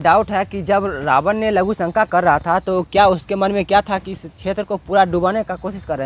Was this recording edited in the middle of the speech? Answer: no; 0 cuts

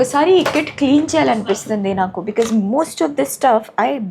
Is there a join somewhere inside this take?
no; 0 cuts

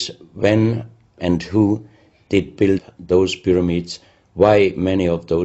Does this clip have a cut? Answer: no; 0 cuts

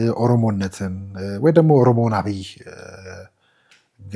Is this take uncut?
yes; 0 cuts

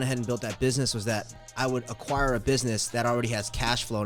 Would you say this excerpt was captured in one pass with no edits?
no; 1 cut; at 1.4 s

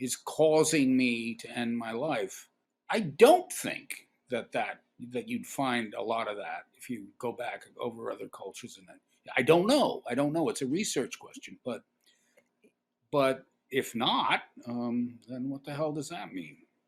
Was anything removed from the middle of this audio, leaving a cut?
no; 0 cuts

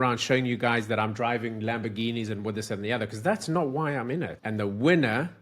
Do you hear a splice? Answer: yes; 1 cut; at 4.4 s

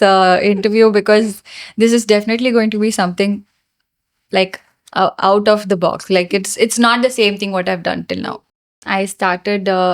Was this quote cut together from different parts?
yes; 1 cut; at 8.7 s

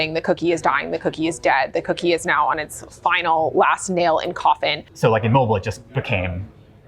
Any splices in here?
yes; 1 cut; at 4.8 s

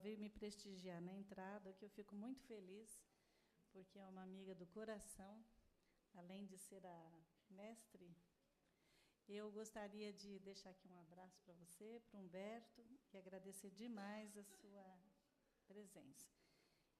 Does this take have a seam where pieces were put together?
no; 0 cuts

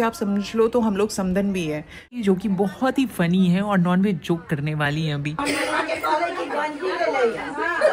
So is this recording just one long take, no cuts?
no; 1 cut; at 2.1 s

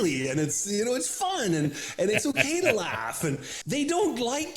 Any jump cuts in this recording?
yes; 1 cut; at 3.5 s

